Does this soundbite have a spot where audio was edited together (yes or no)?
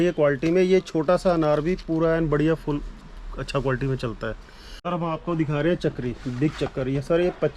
yes